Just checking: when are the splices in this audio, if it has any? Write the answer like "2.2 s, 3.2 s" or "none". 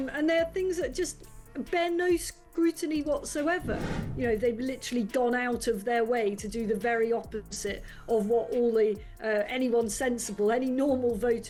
none